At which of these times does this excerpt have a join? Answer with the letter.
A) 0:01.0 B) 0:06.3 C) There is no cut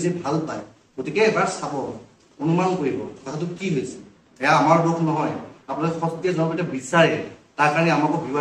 C